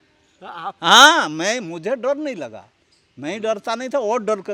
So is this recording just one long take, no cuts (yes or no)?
yes